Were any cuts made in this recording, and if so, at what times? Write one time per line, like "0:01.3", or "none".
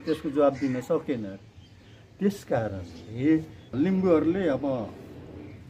0:03.6